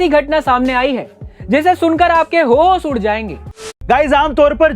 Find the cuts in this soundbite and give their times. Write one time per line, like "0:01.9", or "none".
0:03.5